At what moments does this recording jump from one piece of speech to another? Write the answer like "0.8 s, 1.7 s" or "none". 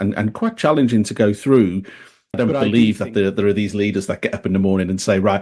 2.4 s